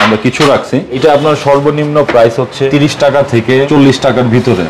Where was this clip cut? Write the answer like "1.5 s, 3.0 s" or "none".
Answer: 1.0 s, 2.7 s, 3.7 s